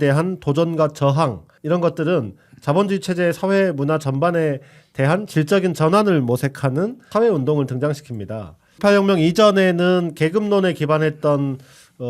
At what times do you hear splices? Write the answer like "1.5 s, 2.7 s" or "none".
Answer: 1.5 s, 7.0 s, 8.8 s